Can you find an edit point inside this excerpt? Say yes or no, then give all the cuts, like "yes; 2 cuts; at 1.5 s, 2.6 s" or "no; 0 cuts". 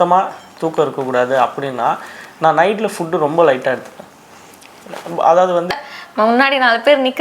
yes; 1 cut; at 5.7 s